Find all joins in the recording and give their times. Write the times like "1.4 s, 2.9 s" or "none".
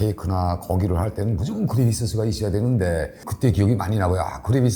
3.3 s